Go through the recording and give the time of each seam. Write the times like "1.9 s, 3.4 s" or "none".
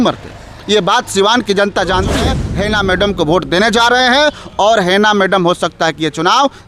2.4 s